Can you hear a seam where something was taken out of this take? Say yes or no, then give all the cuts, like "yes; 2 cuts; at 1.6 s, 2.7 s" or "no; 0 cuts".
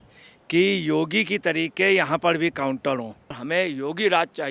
yes; 1 cut; at 3.4 s